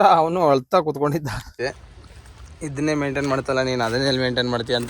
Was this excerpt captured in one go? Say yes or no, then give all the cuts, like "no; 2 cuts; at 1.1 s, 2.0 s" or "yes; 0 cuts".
no; 1 cut; at 1.6 s